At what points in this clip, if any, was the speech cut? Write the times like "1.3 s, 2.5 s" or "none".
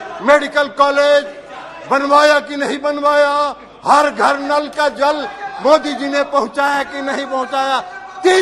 none